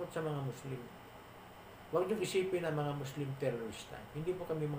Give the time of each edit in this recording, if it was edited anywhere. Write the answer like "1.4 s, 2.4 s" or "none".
none